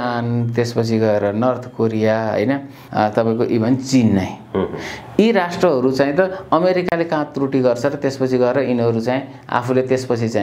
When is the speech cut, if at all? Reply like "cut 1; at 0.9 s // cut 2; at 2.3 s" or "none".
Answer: cut 1; at 2.8 s